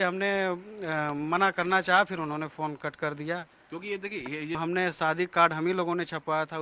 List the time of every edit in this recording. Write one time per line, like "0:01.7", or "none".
0:04.5